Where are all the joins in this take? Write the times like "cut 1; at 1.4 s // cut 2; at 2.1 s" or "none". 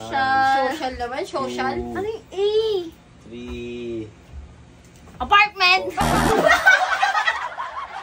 none

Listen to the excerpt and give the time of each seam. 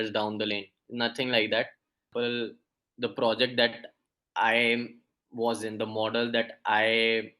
cut 1; at 2.1 s

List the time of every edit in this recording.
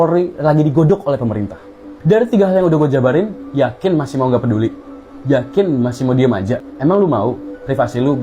cut 1; at 1.9 s // cut 2; at 6.7 s

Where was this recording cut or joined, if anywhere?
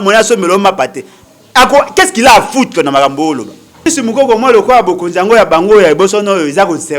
cut 1; at 3.8 s

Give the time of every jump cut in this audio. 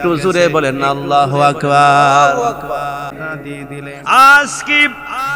cut 1; at 3.1 s

